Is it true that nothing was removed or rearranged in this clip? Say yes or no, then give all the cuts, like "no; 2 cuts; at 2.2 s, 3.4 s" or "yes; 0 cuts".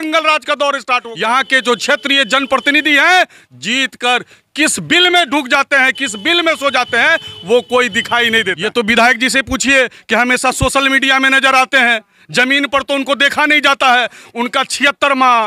no; 2 cuts; at 1.1 s, 8.5 s